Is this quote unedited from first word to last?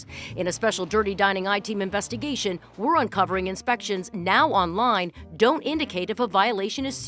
yes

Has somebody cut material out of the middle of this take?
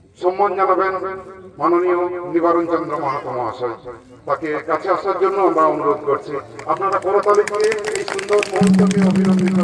no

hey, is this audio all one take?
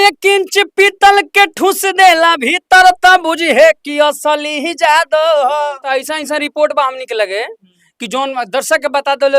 no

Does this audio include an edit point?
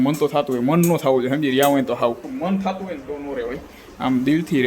yes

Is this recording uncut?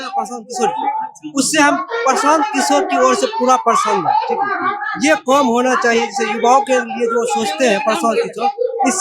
yes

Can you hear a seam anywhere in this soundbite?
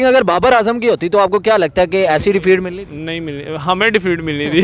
no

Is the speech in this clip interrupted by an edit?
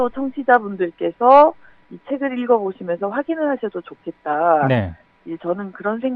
no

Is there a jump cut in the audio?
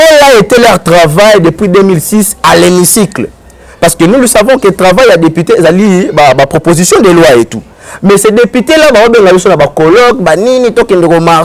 no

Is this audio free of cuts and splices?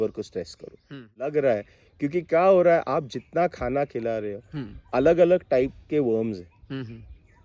no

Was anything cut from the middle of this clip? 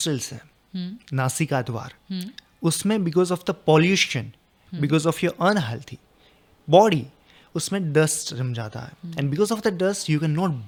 no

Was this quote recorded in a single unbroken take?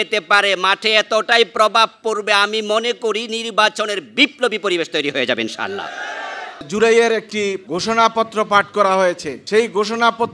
no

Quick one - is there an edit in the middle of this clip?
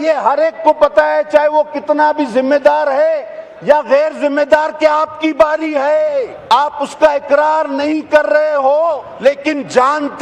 yes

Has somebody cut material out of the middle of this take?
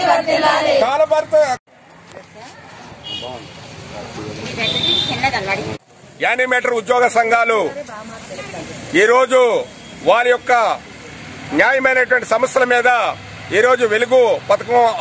yes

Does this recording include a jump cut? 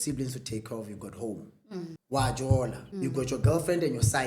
yes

